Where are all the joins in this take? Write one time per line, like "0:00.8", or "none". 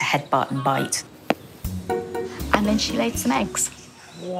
0:01.1
0:02.6